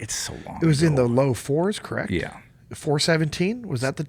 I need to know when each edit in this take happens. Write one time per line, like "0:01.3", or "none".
none